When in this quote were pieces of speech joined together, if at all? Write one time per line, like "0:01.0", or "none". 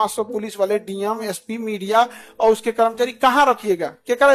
none